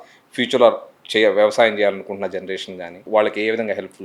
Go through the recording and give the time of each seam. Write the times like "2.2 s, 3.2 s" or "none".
2.9 s